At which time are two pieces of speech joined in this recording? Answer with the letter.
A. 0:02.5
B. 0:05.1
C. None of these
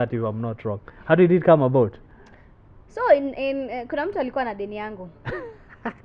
C